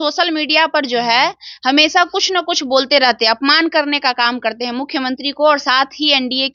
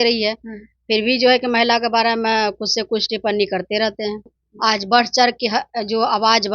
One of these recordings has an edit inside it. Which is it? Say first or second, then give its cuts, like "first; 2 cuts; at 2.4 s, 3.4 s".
second; 1 cut; at 4.4 s